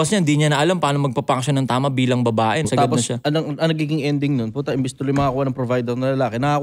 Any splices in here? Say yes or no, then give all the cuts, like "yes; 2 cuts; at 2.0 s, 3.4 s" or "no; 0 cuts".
yes; 1 cut; at 2.7 s